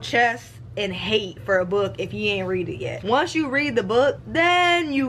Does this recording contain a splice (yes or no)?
yes